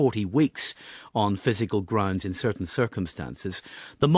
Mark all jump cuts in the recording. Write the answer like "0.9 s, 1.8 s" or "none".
none